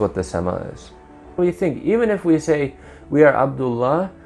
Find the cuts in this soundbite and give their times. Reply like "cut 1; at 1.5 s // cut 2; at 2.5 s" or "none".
cut 1; at 1.4 s